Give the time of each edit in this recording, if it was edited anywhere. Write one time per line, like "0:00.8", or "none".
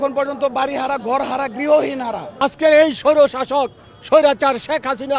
none